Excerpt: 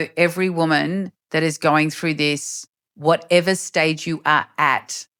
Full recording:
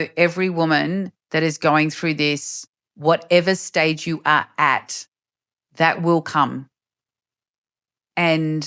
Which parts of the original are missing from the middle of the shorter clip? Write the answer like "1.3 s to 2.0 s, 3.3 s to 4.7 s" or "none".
none